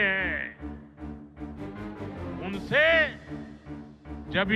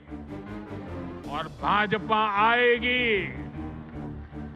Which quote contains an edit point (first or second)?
second